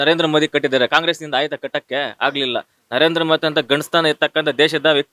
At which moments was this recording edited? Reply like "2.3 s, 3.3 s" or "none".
none